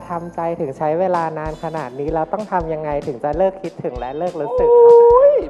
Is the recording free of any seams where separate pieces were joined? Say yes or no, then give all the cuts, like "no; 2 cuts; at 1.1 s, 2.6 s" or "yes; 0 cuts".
yes; 0 cuts